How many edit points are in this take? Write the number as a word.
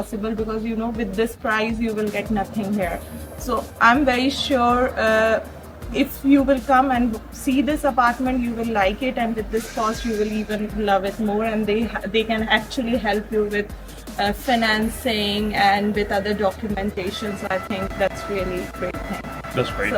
zero